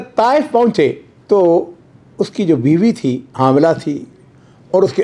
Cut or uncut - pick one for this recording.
cut